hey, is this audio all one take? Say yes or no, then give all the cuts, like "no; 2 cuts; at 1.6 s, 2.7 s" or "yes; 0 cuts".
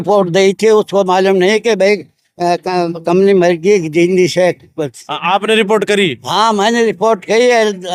yes; 0 cuts